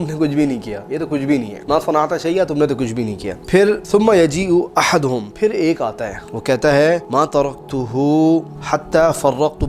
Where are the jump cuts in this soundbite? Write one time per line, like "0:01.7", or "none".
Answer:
none